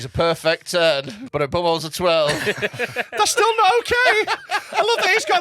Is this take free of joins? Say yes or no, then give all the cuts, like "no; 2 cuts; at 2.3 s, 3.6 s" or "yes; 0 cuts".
no; 1 cut; at 1.2 s